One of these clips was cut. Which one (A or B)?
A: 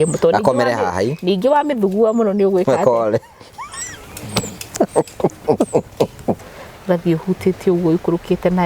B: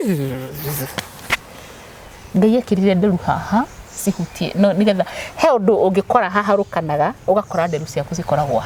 A